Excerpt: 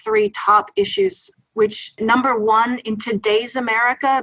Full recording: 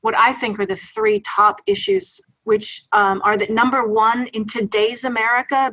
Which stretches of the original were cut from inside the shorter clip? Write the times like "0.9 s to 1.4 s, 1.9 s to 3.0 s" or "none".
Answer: 2.9 s to 3.4 s